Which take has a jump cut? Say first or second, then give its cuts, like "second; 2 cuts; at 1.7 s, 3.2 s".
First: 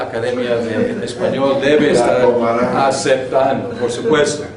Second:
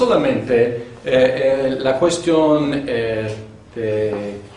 first; 1 cut; at 1.2 s